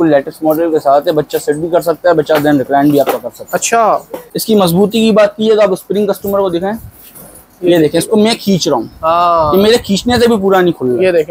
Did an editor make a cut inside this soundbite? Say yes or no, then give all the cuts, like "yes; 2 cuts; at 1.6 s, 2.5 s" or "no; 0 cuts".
yes; 1 cut; at 4.3 s